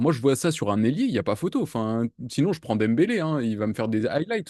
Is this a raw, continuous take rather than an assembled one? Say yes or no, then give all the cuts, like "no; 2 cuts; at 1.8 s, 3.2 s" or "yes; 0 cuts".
yes; 0 cuts